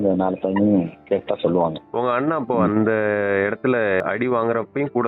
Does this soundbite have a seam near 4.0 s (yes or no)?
yes